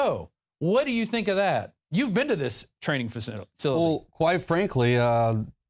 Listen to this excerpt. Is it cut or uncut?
cut